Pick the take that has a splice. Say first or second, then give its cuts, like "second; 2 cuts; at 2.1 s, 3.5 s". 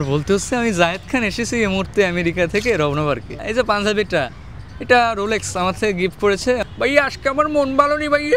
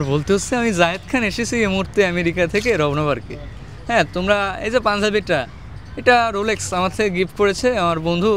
first; 2 cuts; at 3.4 s, 6.6 s